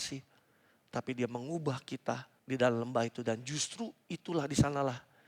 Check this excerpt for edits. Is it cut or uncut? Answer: cut